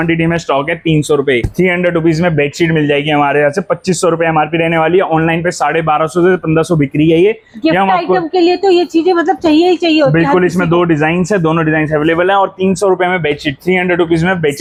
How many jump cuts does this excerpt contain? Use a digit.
0